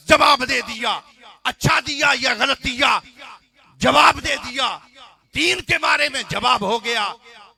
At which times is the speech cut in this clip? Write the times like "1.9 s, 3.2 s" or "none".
none